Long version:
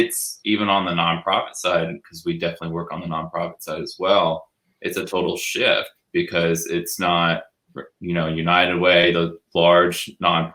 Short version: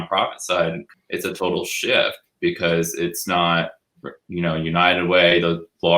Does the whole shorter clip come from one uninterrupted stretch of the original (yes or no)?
no